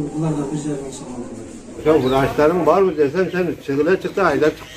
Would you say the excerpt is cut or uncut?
cut